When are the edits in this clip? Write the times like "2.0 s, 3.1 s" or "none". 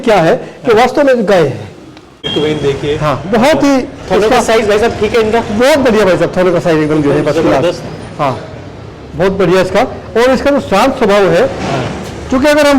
2.3 s